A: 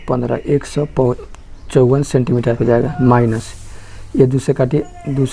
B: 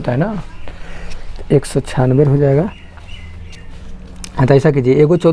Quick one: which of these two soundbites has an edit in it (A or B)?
A